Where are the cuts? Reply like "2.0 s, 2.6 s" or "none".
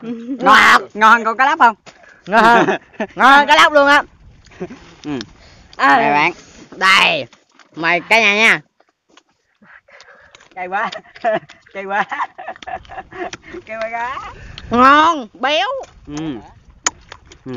15.9 s